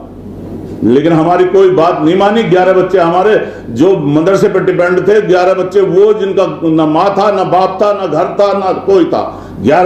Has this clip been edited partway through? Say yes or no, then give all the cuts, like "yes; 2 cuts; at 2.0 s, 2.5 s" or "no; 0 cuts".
no; 0 cuts